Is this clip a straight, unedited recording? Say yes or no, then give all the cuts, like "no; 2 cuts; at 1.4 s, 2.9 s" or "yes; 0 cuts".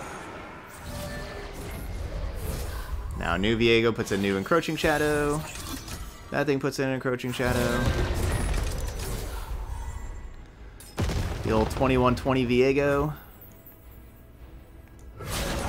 yes; 0 cuts